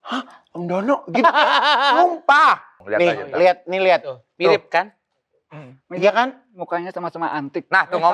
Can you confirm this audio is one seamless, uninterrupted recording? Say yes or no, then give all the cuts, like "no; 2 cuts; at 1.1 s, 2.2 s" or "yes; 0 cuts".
no; 1 cut; at 2.8 s